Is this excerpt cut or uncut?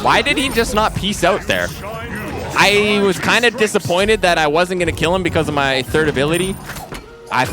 uncut